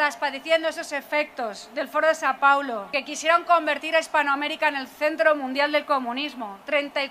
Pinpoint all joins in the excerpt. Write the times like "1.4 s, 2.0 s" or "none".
2.9 s